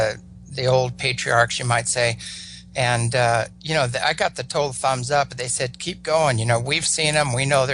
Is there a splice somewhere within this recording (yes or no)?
no